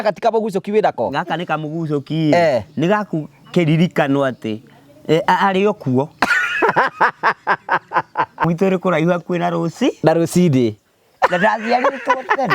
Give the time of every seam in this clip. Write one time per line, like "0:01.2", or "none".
0:08.4

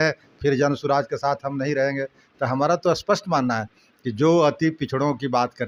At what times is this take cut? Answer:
none

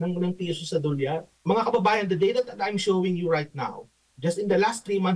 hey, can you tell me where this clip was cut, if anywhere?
0:01.3

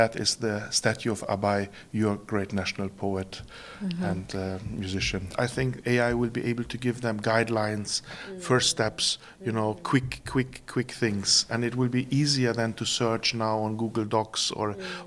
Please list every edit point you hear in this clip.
0:05.3

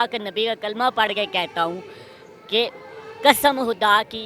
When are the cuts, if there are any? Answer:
none

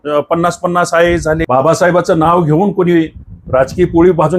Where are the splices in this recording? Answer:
0:01.4

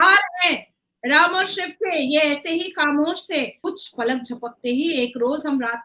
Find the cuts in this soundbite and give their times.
0:03.6

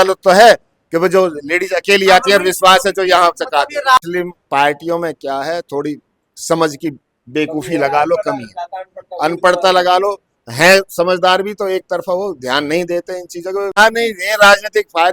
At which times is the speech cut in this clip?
0:04.0
0:13.8

